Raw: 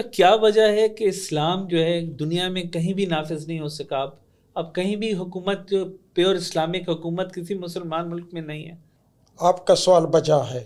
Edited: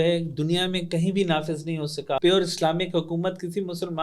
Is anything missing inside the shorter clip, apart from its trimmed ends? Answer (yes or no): yes